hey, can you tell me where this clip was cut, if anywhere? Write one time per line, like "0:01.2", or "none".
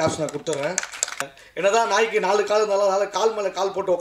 0:01.3